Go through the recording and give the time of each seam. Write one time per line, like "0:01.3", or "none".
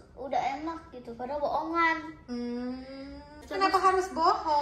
0:03.4